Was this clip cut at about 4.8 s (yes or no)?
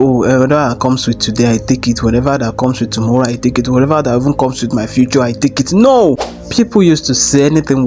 no